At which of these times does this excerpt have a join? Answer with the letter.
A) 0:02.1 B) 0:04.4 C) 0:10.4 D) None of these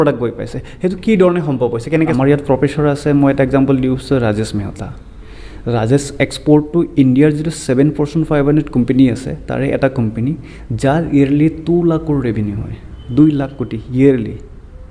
A